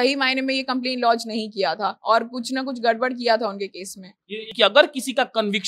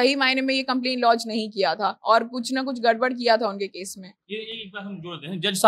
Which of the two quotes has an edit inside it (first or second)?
first